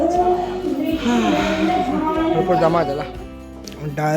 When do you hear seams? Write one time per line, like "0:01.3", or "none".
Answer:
0:03.1